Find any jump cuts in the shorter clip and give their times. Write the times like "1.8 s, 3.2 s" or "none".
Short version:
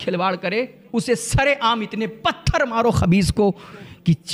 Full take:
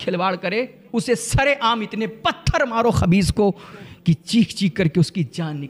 none